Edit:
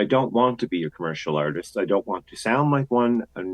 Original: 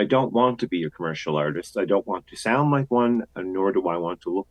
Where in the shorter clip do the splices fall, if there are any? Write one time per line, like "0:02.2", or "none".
none